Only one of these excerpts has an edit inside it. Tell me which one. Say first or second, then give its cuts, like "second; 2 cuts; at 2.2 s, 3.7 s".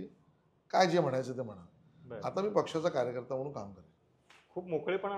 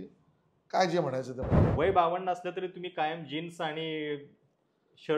second; 1 cut; at 1.6 s